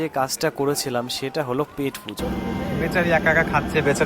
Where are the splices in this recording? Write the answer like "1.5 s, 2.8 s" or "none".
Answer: 2.2 s

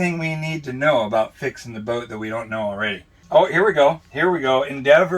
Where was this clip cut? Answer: 3.1 s

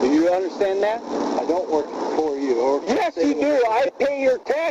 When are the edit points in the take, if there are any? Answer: 1.1 s

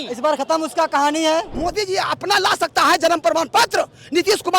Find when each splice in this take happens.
1.5 s

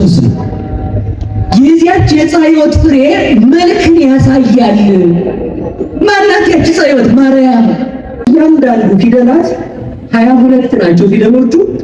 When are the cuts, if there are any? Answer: 8.3 s

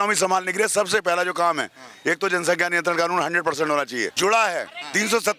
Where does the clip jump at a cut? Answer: 4.1 s

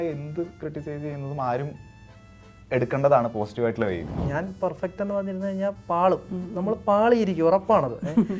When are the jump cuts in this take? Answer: 4.2 s

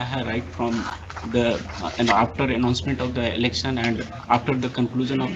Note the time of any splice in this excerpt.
none

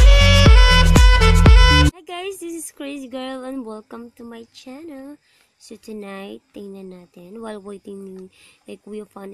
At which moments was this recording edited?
2.0 s

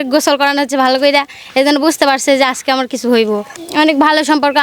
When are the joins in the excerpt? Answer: 3.5 s

